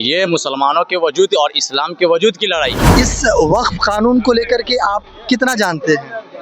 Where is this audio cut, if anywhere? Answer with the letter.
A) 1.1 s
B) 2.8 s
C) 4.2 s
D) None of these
B